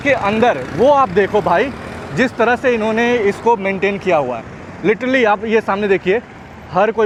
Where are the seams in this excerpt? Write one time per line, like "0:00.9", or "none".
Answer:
none

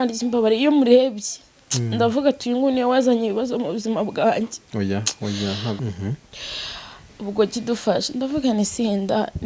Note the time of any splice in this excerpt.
0:05.8

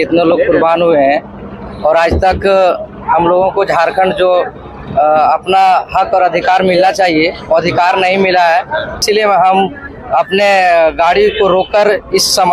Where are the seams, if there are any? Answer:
0:09.0

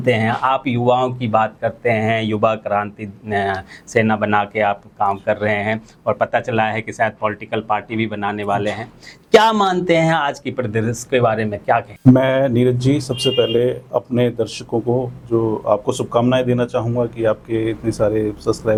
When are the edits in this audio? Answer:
none

